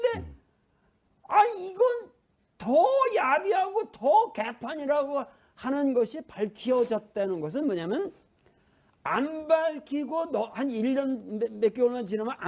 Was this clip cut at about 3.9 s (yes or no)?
no